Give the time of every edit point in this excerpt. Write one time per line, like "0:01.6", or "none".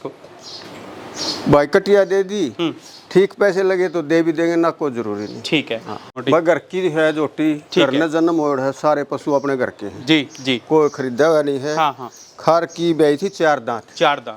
0:06.1